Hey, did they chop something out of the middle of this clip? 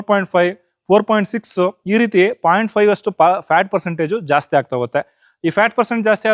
no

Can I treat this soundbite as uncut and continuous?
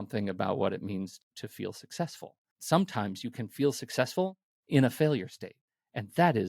no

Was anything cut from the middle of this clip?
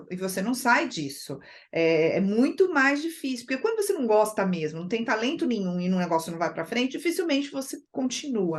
no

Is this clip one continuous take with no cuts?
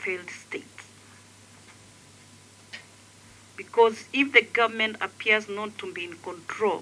yes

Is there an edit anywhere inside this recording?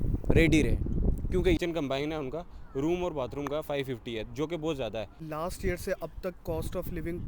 yes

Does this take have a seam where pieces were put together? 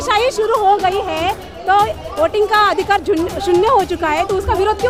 no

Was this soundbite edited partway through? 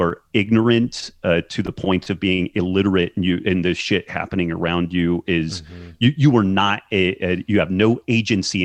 no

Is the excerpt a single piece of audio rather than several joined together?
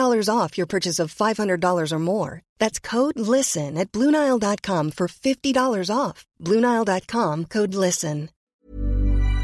no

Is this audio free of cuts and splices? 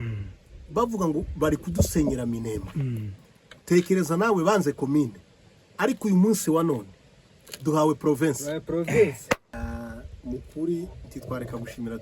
no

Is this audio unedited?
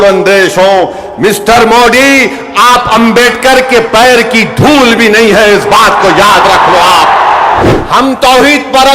no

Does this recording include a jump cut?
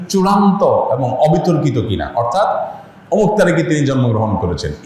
no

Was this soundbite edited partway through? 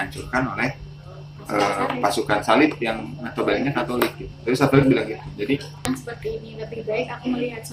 yes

